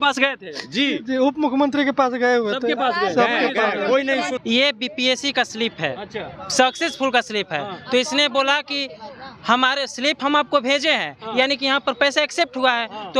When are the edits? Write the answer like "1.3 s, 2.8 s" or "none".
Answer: 4.4 s